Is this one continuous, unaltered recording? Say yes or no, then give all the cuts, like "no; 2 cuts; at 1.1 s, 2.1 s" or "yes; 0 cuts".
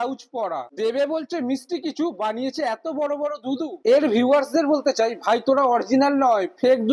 no; 1 cut; at 3.8 s